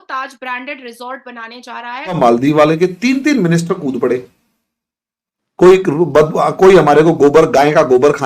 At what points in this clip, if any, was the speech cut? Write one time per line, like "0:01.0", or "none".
0:02.2

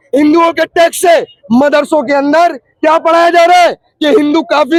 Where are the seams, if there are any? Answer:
none

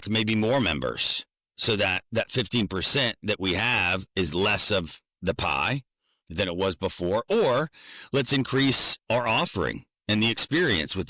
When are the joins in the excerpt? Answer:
none

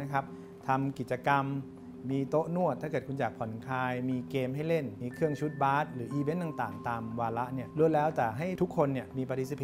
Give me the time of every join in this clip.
0:05.0
0:07.7
0:08.5

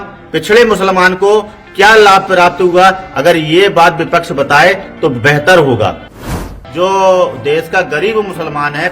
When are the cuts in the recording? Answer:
0:06.3

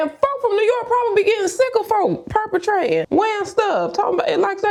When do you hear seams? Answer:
none

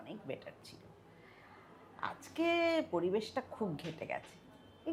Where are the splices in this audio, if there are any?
none

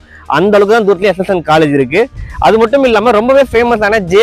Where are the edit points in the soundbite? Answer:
none

